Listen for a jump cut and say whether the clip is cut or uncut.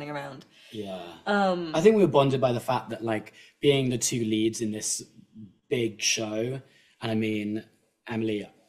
uncut